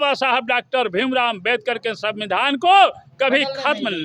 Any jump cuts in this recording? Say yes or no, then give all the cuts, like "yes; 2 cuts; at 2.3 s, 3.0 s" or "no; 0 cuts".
no; 0 cuts